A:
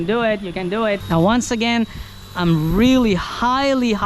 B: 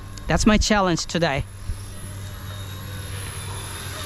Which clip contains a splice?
A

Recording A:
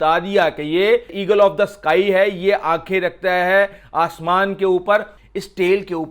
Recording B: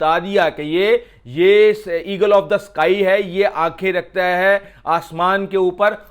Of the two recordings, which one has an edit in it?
A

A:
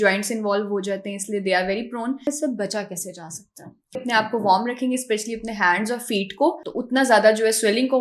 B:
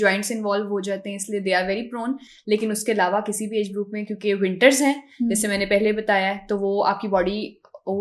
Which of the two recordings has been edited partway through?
A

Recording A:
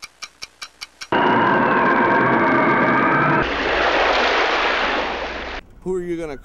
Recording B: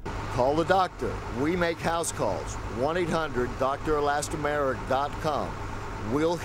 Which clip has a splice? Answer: A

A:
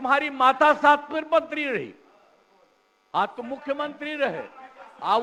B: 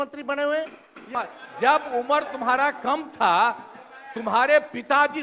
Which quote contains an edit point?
B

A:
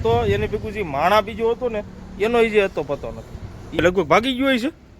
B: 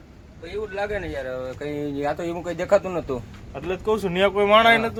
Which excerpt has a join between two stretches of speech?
A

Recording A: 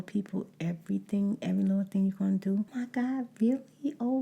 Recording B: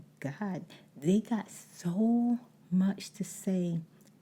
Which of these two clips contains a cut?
A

